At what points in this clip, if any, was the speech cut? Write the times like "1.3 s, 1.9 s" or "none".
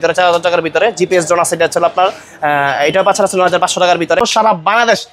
4.2 s